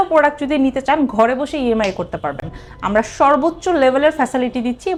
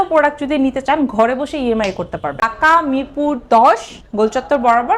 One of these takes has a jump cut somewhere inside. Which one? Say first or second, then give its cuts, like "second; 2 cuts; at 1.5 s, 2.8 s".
second; 1 cut; at 2.5 s